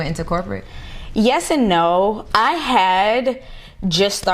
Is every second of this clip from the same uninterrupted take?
no; 1 cut; at 2.2 s

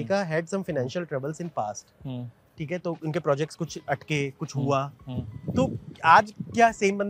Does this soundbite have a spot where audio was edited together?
no; 0 cuts

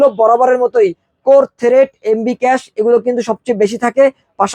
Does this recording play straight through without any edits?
yes; 0 cuts

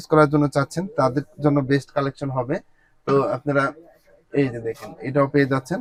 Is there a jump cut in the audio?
no; 0 cuts

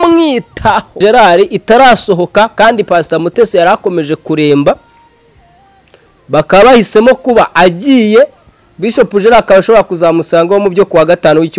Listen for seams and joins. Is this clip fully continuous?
no; 1 cut; at 0.9 s

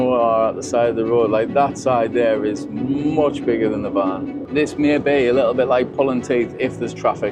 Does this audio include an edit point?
yes; 1 cut; at 4.4 s

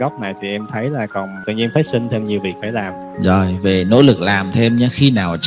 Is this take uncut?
no; 2 cuts; at 1.4 s, 3.0 s

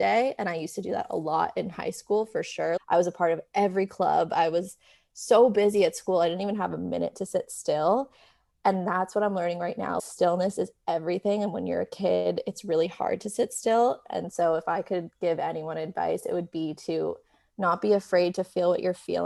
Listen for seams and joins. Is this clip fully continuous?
yes; 0 cuts

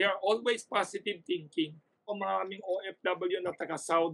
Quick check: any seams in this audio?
yes; 1 cut; at 2.1 s

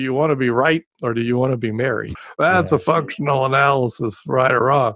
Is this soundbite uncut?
no; 1 cut; at 2.1 s

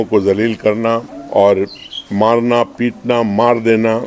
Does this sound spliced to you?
yes; 1 cut; at 1.2 s

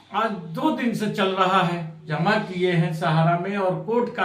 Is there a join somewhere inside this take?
yes; 1 cut; at 2.1 s

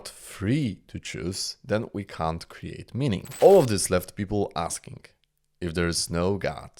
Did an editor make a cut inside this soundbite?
yes; 1 cut; at 3.3 s

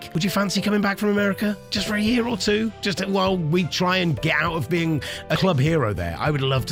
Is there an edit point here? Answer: no; 0 cuts

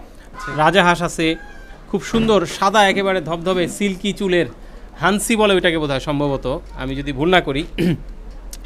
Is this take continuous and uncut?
yes; 0 cuts

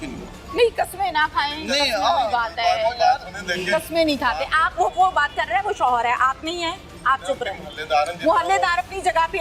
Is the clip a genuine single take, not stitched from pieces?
yes; 0 cuts

